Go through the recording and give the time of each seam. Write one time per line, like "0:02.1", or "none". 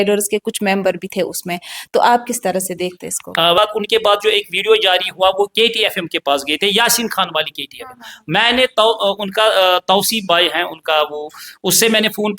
0:03.6